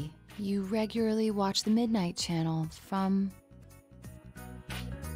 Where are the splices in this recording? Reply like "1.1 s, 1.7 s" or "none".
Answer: 3.5 s